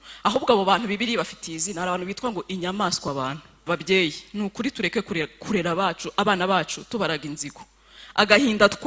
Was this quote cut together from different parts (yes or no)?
yes